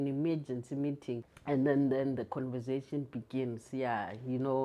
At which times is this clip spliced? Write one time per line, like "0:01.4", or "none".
0:01.3